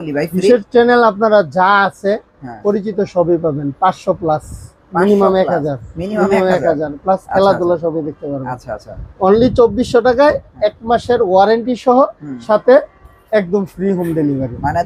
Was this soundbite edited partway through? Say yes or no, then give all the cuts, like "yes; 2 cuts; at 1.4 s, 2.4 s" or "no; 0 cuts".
no; 0 cuts